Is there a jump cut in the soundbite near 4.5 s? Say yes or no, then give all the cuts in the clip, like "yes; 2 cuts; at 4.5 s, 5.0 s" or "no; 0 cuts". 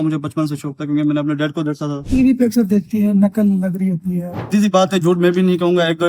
yes; 2 cuts; at 2.0 s, 4.5 s